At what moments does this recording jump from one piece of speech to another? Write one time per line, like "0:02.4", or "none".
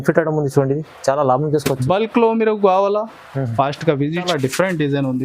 0:04.3

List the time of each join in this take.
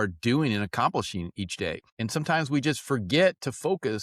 0:01.9

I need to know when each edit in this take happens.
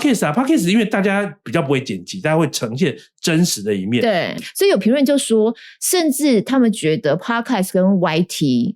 0:04.3

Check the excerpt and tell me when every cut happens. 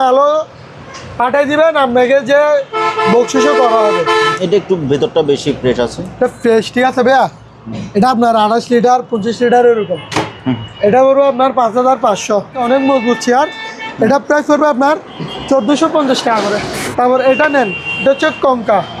0:04.3
0:12.6
0:16.8

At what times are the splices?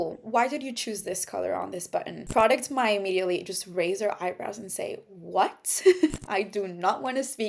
0:02.2

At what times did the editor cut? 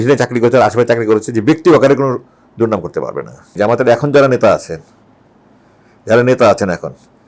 0:03.5

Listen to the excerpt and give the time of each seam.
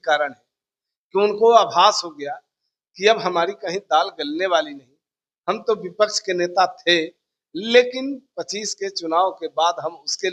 none

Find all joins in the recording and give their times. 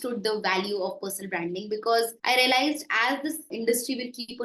0:02.2
0:03.5

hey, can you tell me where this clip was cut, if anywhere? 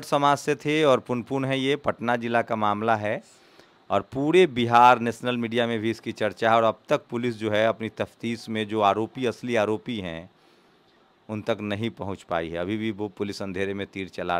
none

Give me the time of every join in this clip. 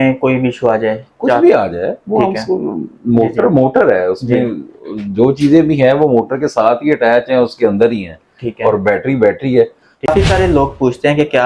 0:10.1

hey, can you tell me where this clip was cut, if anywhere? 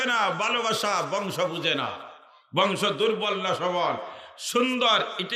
none

